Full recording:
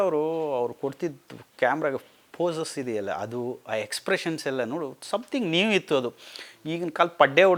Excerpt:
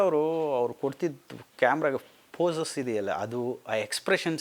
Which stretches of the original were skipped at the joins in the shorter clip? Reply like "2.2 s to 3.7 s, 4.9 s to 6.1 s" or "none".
none

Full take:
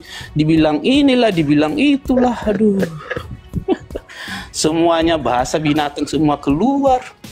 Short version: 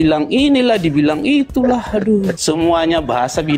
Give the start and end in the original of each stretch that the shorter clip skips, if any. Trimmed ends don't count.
2.9 s to 4.5 s

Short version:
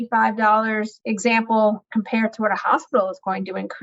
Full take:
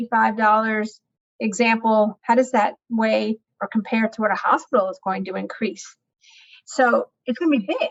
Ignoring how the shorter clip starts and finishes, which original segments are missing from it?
0.9 s to 1.3 s, 2.2 s to 3.6 s

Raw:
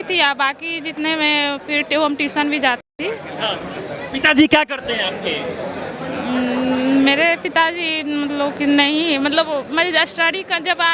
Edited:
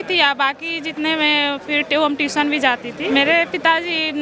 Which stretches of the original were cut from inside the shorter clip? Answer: 3.1 s to 7.0 s

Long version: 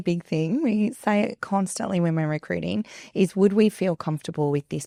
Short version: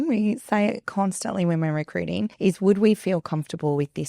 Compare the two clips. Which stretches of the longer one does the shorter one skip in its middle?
2.9 s to 3.1 s

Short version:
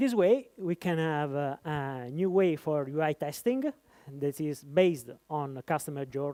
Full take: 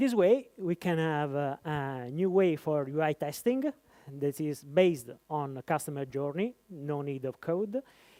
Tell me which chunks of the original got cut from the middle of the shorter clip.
none

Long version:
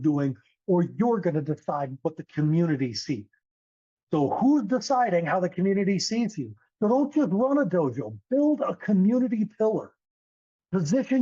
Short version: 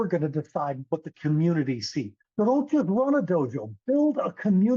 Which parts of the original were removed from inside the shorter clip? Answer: 3.3 s to 6.6 s

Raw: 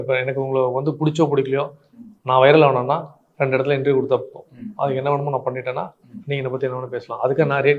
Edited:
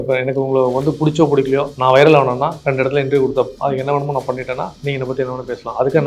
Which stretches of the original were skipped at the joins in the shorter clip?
1.7 s to 2.2 s, 3.1 s to 3.3 s, 4.3 s to 4.7 s, 5.9 s to 6.2 s

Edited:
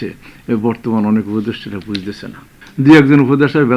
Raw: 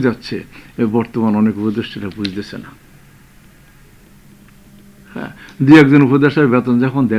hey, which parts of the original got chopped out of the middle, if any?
2.9 s to 5.4 s

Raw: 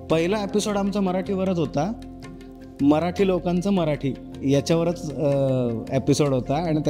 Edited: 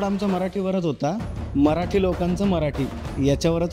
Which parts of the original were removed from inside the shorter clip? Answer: 2.1 s to 2.6 s

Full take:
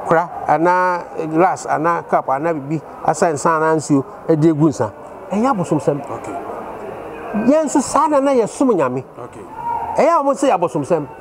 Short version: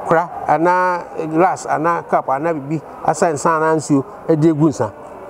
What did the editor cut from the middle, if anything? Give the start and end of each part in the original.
none

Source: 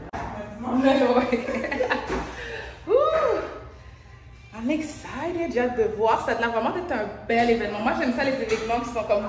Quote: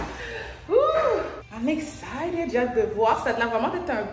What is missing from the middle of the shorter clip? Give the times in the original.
3.6 s to 4.4 s

